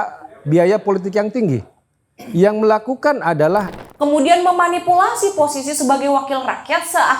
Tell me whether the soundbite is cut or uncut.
cut